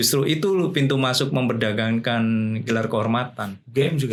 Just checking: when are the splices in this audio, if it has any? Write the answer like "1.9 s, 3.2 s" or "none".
none